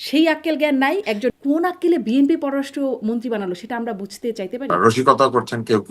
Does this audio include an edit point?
yes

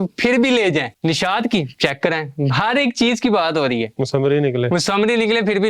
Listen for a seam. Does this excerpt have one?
yes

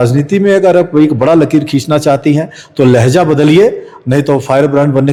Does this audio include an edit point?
no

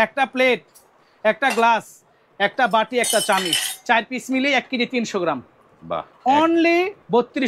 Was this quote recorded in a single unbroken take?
yes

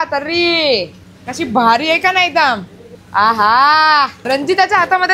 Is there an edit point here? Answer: yes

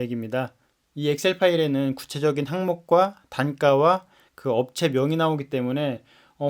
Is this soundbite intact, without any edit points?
yes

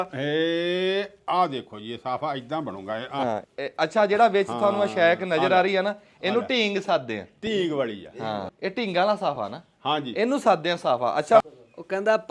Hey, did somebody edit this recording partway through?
yes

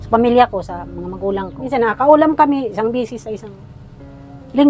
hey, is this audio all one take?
no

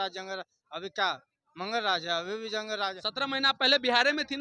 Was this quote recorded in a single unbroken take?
no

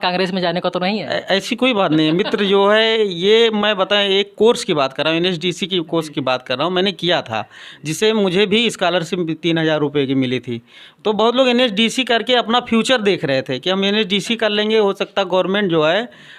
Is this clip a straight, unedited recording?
yes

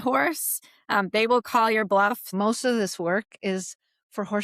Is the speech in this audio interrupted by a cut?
yes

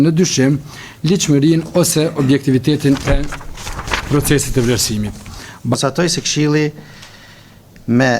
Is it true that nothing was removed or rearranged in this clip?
no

